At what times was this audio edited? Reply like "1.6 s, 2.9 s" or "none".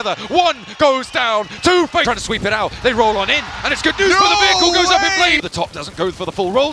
2.0 s, 5.4 s